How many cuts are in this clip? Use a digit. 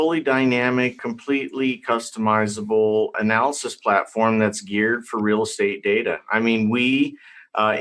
2